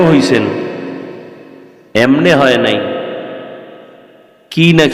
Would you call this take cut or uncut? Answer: uncut